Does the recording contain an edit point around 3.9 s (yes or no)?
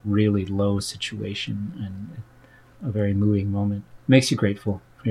yes